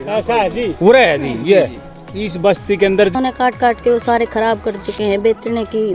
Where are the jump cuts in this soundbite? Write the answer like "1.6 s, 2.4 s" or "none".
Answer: 3.1 s